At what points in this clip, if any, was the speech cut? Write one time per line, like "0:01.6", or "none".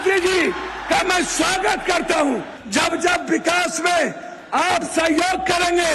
0:02.5